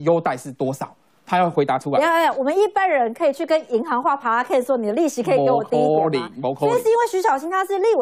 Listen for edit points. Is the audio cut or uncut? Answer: uncut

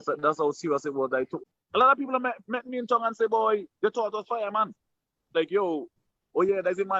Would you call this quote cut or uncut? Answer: cut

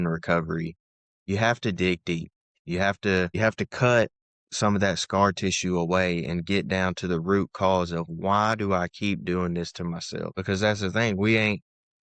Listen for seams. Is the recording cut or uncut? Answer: cut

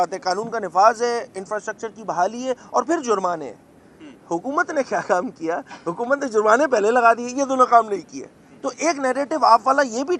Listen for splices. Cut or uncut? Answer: uncut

